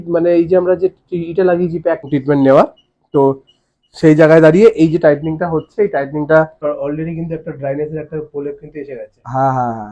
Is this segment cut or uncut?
cut